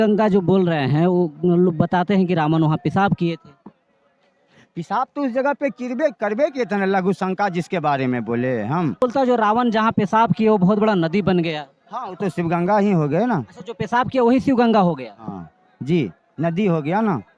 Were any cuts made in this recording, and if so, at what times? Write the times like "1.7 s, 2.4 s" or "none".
9.0 s